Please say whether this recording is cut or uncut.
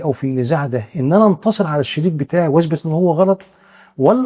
uncut